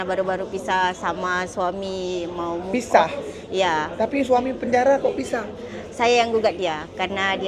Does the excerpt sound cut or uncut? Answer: uncut